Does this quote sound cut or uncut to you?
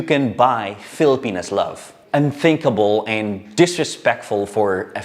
cut